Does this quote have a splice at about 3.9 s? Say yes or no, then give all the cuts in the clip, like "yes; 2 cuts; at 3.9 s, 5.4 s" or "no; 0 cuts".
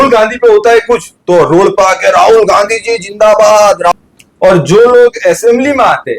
yes; 1 cut; at 3.9 s